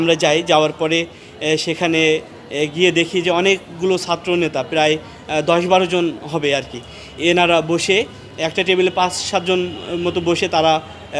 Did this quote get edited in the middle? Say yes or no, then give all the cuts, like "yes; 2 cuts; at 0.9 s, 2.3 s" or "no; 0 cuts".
no; 0 cuts